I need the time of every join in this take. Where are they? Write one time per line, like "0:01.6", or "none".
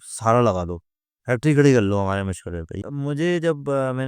0:02.8